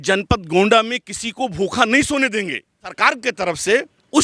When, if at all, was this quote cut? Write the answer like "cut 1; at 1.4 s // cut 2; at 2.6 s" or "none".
cut 1; at 3.0 s